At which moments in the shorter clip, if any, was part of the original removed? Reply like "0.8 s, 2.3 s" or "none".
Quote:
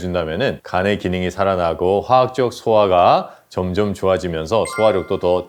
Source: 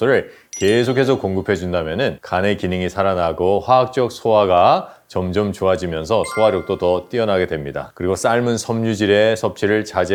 none